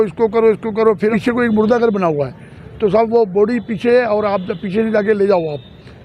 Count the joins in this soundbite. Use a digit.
1